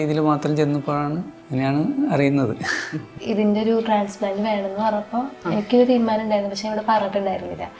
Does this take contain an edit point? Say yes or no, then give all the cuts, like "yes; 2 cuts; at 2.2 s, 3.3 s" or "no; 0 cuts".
yes; 2 cuts; at 1.3 s, 3.2 s